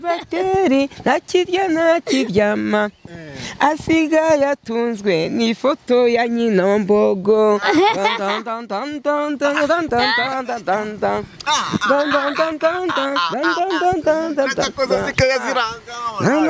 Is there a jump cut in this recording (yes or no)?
no